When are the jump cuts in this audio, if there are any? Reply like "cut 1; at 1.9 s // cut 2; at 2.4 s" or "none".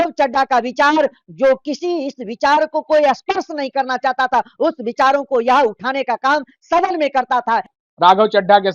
cut 1; at 7.7 s